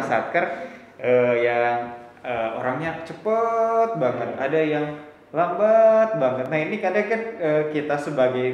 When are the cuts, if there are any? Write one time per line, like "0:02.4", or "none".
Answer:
none